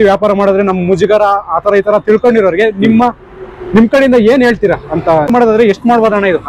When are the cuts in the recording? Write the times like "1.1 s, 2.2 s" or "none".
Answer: 5.3 s

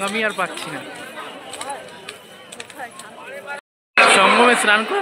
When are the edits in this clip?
3.6 s

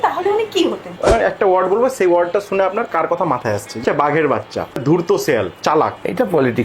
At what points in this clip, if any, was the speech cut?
1.0 s, 3.8 s, 4.8 s, 5.5 s

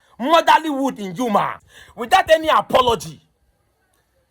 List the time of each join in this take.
1.6 s

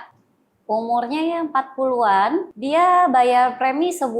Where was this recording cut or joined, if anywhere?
2.5 s

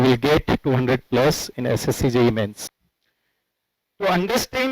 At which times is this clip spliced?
2.7 s

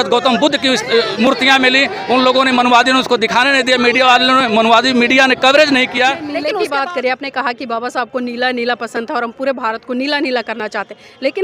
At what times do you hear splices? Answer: 6.4 s

